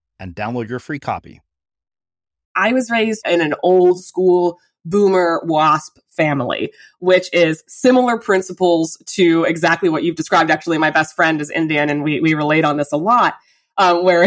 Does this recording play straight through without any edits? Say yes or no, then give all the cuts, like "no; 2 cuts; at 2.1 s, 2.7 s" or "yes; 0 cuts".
no; 2 cuts; at 2.5 s, 3.2 s